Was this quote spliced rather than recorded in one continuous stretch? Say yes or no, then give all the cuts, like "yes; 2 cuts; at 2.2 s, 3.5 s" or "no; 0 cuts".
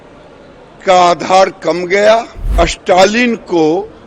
yes; 1 cut; at 2.4 s